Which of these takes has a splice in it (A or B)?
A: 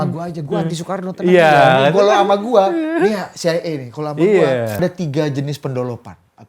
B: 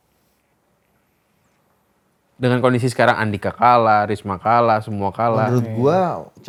A